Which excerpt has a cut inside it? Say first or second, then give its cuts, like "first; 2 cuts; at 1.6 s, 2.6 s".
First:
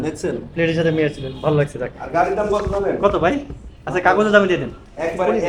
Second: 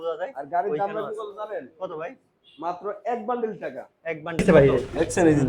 second; 1 cut; at 4.4 s